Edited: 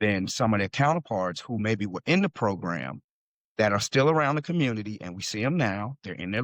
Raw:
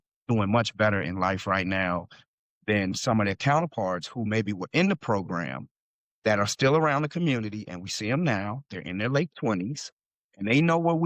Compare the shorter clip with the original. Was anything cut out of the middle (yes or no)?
no